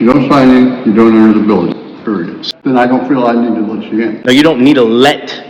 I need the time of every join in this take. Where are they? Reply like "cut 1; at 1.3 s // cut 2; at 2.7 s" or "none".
cut 1; at 2.3 s